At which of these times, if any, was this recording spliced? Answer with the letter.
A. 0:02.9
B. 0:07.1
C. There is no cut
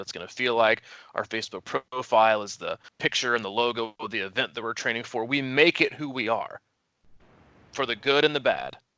A